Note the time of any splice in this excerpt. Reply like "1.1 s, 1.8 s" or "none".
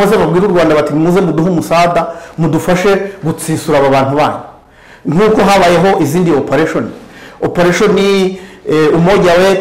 none